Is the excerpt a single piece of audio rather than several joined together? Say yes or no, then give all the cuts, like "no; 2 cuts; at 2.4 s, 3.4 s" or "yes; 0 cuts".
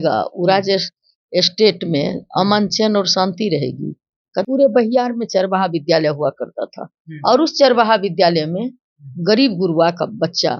no; 1 cut; at 4.4 s